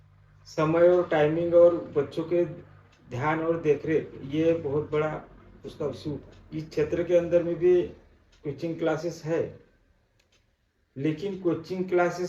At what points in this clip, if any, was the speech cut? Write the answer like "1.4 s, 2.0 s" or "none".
6.4 s